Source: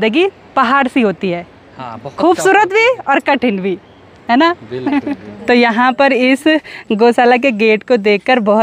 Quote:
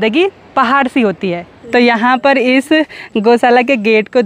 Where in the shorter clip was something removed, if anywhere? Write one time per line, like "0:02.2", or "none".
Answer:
0:01.5